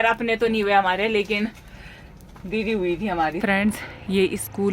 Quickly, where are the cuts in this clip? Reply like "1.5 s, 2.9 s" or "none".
3.6 s